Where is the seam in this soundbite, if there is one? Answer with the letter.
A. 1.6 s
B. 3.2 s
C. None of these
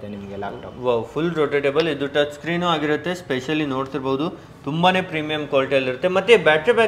C